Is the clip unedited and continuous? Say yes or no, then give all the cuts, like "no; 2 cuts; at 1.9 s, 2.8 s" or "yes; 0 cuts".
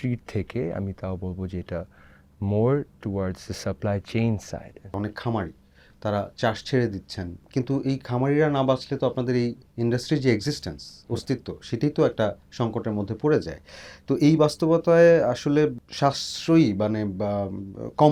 yes; 0 cuts